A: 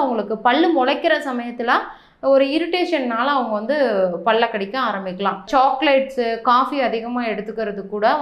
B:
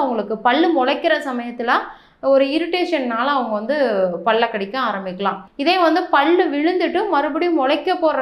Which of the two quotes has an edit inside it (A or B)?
A